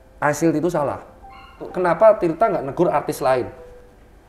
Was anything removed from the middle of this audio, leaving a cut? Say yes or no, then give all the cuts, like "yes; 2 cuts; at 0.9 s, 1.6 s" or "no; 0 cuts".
yes; 1 cut; at 1.7 s